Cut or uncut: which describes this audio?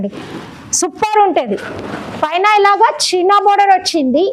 uncut